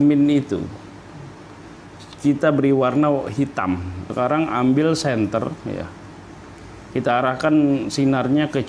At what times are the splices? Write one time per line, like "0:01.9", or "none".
0:02.0
0:04.0